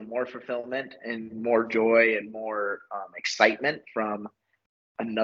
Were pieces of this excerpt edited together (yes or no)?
no